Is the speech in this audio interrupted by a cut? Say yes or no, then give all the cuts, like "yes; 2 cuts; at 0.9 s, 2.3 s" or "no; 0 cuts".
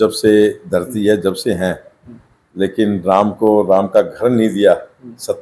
no; 0 cuts